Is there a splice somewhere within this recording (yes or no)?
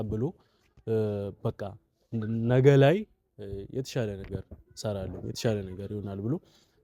no